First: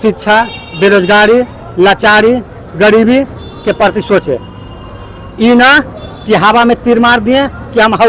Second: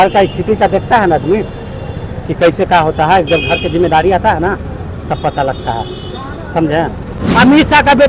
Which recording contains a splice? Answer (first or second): second